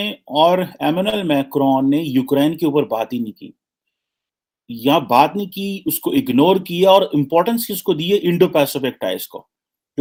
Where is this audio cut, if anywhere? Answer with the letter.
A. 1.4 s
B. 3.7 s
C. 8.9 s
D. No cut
D